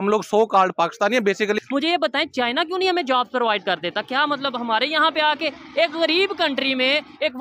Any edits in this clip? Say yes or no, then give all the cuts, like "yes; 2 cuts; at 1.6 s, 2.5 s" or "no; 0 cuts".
yes; 1 cut; at 1.6 s